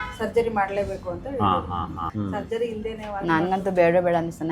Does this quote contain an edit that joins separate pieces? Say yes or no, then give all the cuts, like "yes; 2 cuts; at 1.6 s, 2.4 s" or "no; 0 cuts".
yes; 1 cut; at 2.1 s